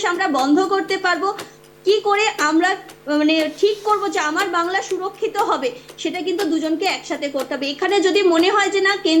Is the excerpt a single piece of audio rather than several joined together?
yes; 0 cuts

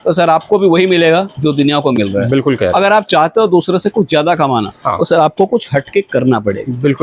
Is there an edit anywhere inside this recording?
no; 0 cuts

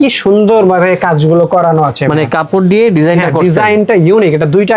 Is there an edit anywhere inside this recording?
no; 0 cuts

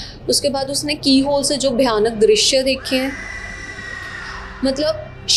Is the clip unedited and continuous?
yes; 0 cuts

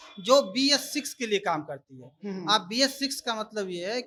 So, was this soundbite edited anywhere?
no; 0 cuts

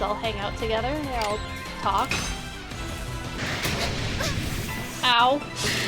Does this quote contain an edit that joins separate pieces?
yes; 1 cut; at 3.4 s

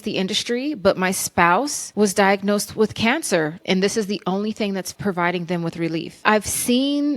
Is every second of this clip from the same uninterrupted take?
no; 4 cuts; at 1.8 s, 3.6 s, 4.9 s, 6.1 s

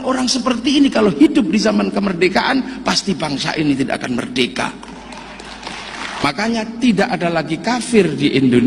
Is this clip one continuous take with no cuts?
no; 1 cut; at 6.2 s

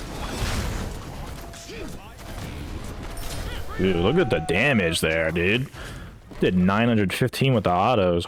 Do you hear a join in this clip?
no; 0 cuts

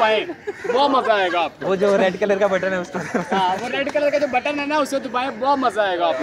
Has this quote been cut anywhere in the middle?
no; 0 cuts

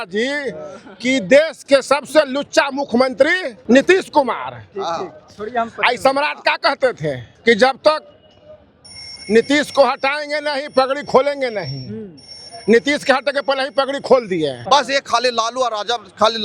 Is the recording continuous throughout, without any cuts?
no; 3 cuts; at 3.5 s, 7.3 s, 14.6 s

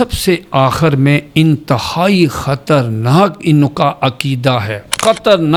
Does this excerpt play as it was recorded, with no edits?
yes; 0 cuts

